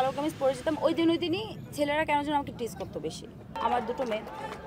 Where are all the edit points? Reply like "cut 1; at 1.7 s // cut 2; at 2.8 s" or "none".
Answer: cut 1; at 3.5 s